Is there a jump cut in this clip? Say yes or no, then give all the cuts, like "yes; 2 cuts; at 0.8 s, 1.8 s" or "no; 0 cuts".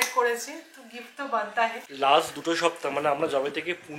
yes; 1 cut; at 1.8 s